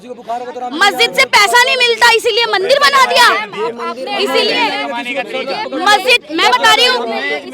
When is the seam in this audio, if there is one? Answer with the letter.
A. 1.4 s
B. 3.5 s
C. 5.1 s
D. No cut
D